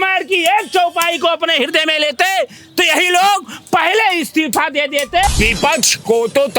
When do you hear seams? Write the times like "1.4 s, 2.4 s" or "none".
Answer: 5.3 s